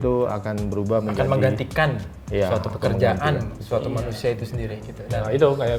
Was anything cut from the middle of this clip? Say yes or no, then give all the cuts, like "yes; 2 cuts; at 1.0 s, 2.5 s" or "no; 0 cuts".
no; 0 cuts